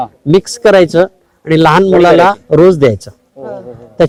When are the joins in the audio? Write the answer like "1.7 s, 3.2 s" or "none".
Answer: none

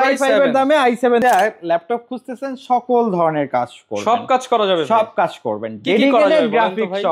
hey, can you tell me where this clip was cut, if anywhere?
1.2 s

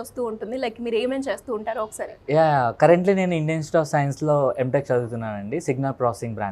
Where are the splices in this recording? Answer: none

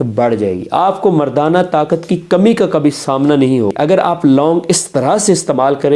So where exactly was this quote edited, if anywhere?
3.7 s

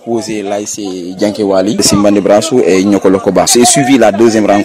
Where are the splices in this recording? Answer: 1.8 s, 3.5 s

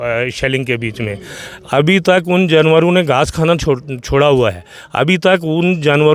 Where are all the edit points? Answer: none

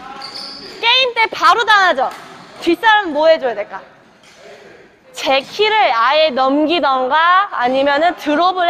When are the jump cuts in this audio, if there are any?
none

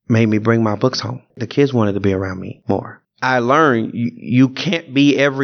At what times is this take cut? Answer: 1.4 s, 2.9 s

